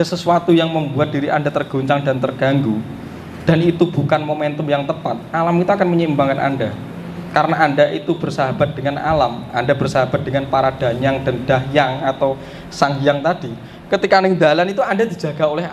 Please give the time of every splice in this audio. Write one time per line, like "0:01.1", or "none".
none